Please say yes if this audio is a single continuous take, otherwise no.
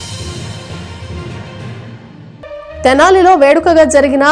yes